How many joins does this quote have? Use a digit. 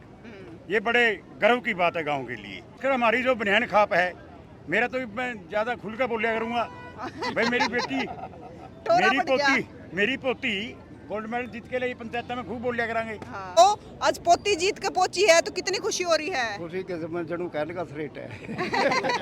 2